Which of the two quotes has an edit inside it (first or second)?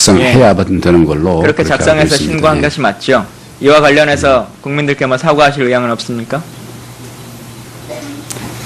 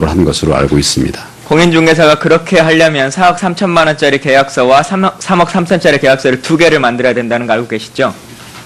second